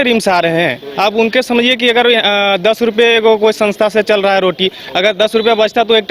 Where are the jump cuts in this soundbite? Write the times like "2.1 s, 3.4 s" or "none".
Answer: none